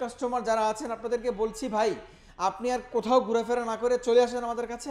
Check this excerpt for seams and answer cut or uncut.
uncut